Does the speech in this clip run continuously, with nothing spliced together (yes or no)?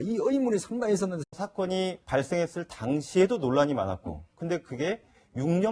yes